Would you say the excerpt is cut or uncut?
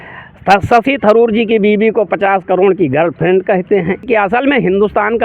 cut